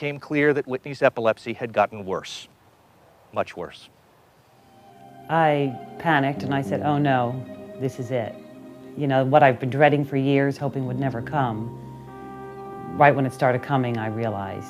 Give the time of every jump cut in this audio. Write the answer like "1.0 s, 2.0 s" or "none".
none